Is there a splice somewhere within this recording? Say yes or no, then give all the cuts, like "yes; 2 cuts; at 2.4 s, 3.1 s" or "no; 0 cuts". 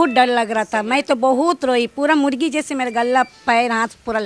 no; 0 cuts